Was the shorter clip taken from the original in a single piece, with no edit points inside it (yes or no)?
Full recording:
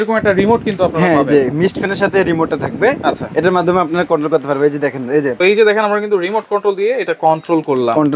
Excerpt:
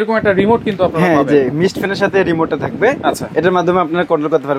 yes